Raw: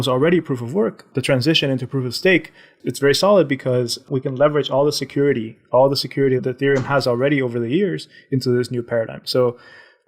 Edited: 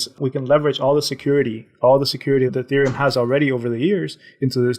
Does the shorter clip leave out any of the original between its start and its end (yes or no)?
no